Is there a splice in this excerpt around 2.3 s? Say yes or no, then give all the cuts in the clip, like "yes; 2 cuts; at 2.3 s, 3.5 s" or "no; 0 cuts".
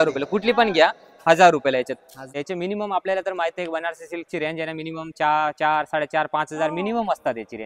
yes; 1 cut; at 2.3 s